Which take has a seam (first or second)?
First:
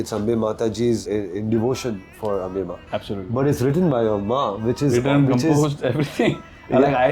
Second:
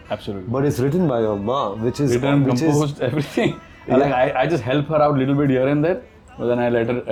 first